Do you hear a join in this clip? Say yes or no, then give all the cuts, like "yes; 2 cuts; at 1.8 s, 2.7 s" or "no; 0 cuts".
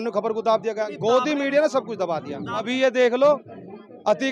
yes; 1 cut; at 2.7 s